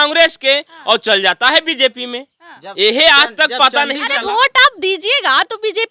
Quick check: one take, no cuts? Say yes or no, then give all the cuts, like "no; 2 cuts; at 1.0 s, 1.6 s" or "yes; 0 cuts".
yes; 0 cuts